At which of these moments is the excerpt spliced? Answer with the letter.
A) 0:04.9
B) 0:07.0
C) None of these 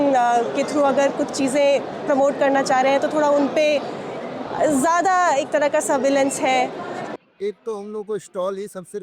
B